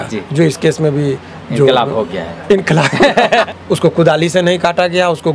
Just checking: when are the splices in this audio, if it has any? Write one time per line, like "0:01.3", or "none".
0:03.5